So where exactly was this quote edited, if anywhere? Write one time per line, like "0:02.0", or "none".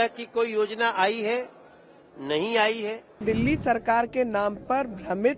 0:03.2